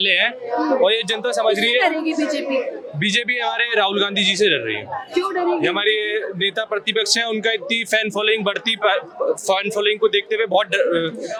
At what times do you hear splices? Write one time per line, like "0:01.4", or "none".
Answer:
none